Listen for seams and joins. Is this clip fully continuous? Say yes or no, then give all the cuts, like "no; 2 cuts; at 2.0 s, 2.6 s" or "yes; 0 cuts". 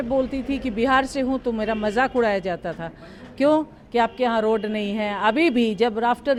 yes; 0 cuts